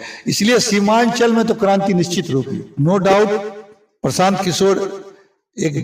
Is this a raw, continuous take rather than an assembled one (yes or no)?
no